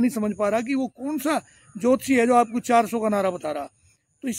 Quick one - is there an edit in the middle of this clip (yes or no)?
no